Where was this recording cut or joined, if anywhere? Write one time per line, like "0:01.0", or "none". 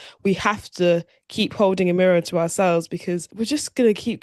0:03.3